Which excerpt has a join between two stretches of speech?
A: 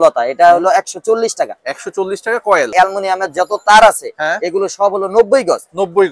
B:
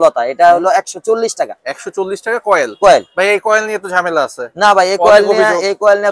A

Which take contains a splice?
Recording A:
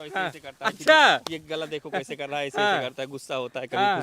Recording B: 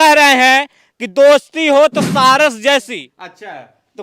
B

